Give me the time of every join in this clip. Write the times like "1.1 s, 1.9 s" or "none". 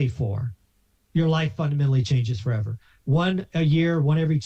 none